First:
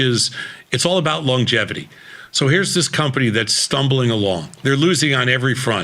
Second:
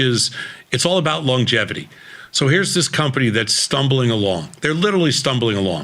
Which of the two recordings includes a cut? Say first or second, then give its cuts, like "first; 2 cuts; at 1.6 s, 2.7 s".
first; 1 cut; at 4.5 s